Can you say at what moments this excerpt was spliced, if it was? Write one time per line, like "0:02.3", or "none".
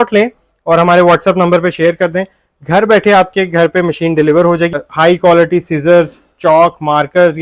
0:04.7